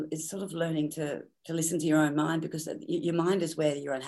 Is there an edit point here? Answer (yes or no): yes